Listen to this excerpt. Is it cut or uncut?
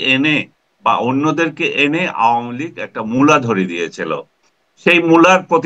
uncut